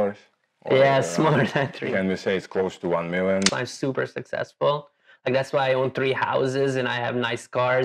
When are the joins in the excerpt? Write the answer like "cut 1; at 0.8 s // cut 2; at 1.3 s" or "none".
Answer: cut 1; at 1.8 s // cut 2; at 3.5 s